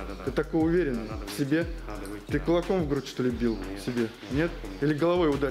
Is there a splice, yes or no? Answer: no